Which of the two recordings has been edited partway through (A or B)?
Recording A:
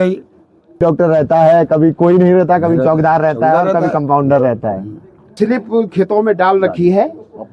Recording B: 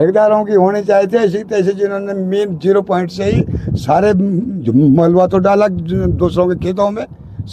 A